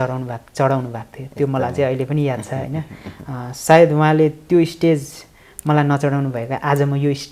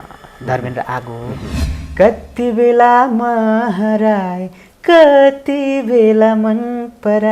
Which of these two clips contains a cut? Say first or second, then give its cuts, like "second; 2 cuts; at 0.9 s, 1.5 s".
second; 1 cut; at 1.5 s